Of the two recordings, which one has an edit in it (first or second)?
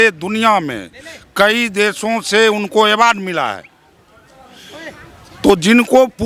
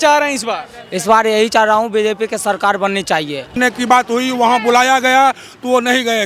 second